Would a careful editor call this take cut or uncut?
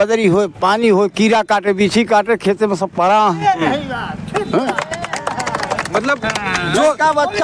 uncut